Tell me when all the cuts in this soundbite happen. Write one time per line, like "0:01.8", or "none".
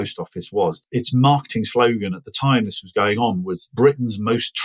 0:00.8
0:03.7